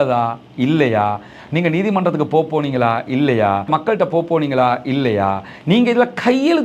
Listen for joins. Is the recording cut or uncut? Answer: cut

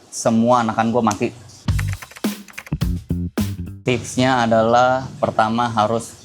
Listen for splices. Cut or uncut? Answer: cut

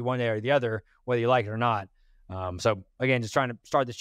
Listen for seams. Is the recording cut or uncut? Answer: uncut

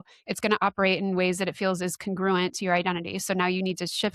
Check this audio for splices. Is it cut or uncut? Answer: uncut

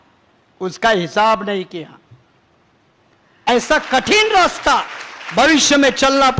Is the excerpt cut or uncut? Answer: cut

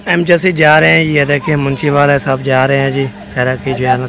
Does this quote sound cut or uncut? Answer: uncut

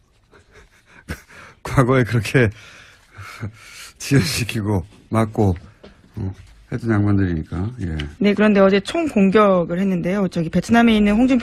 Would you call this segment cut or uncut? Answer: uncut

